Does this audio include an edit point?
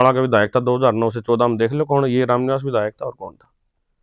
no; 0 cuts

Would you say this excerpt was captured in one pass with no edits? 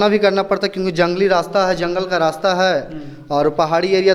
yes; 0 cuts

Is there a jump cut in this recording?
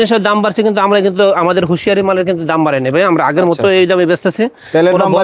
no; 0 cuts

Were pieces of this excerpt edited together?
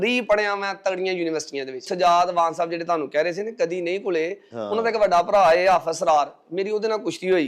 yes; 1 cut; at 1.8 s

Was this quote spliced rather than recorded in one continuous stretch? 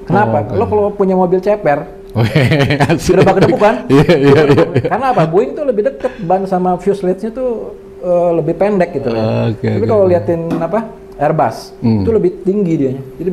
no; 0 cuts

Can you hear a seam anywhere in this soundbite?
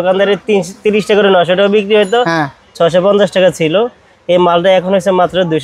no; 0 cuts

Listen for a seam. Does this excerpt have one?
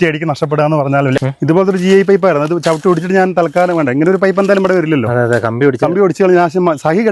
yes; 1 cut; at 1.2 s

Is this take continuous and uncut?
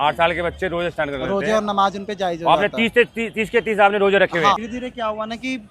no; 1 cut; at 4.6 s

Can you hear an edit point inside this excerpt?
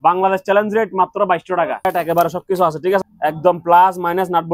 yes; 2 cuts; at 1.8 s, 3.0 s

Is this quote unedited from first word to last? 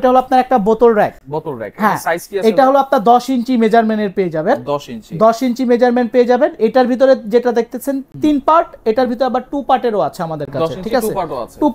yes; 0 cuts

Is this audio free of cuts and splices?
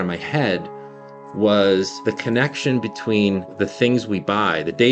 no; 2 cuts; at 1.9 s, 3.5 s

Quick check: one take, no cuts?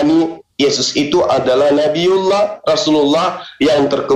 yes; 0 cuts

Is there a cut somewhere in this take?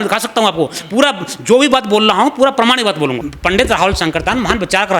yes; 1 cut; at 3.3 s

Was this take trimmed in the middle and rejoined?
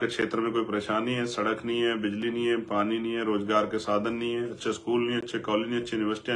no; 0 cuts

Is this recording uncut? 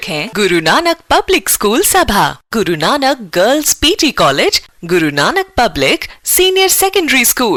yes; 0 cuts

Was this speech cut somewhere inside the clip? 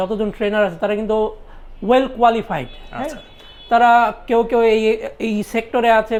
no; 0 cuts

